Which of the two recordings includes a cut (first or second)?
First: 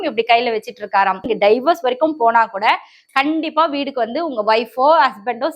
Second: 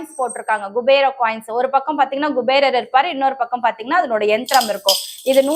first